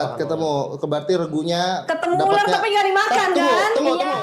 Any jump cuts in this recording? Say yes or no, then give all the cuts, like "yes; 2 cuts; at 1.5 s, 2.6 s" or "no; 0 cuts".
no; 0 cuts